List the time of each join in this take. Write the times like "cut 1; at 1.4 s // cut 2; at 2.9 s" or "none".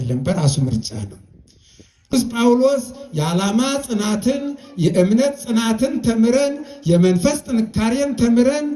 cut 1; at 2.1 s